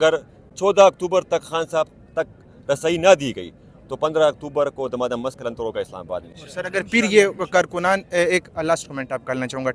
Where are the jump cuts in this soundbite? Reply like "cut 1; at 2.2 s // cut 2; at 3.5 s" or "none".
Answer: none